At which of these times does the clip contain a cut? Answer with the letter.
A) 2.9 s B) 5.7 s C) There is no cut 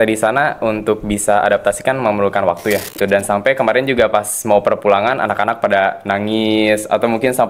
A